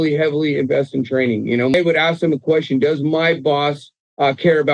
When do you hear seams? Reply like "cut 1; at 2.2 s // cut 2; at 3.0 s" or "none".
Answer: cut 1; at 1.7 s